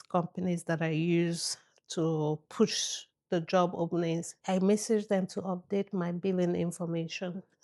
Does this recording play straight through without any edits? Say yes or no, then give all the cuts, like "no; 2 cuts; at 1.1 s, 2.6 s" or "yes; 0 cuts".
no; 1 cut; at 4.3 s